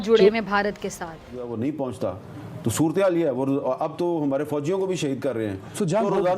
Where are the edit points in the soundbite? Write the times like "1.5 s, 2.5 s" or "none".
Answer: 1.4 s